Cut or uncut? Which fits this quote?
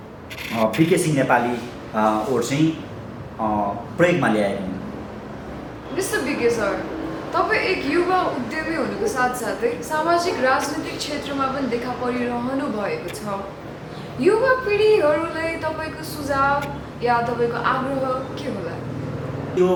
uncut